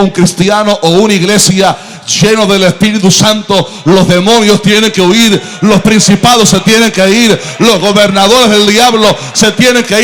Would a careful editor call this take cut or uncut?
uncut